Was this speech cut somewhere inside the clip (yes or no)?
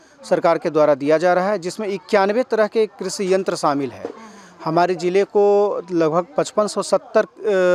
no